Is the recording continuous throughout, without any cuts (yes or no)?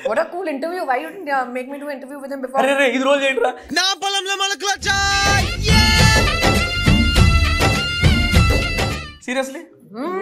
yes